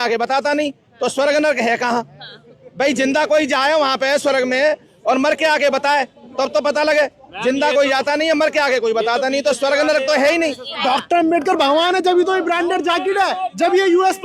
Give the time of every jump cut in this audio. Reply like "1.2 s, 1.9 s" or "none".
10.8 s

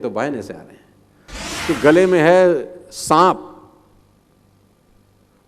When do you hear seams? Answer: 1.5 s

